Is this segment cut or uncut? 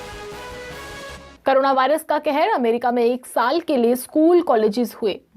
cut